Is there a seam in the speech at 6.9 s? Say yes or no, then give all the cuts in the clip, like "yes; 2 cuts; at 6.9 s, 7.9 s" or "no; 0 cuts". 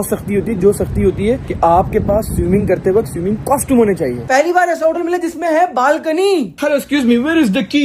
no; 1 cut; at 4.2 s